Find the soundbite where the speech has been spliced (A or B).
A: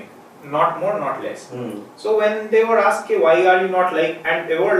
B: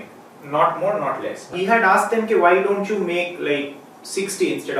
B